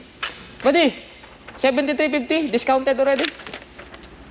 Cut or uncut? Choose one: uncut